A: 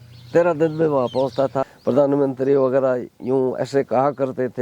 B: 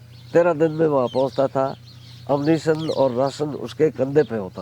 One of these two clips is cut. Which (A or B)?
A